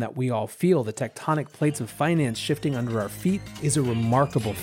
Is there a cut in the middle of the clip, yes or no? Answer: yes